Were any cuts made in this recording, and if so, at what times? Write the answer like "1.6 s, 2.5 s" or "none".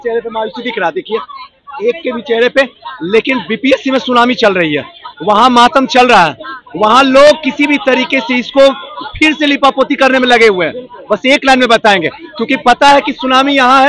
none